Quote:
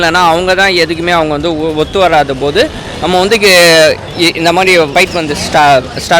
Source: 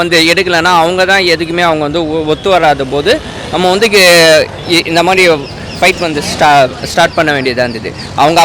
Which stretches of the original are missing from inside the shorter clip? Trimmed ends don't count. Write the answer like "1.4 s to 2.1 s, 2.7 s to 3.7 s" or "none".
5.4 s to 5.8 s